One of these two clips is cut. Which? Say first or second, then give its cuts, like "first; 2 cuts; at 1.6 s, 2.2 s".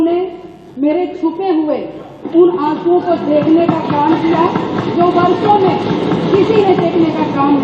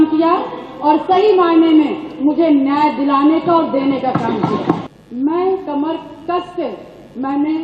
second; 1 cut; at 4.8 s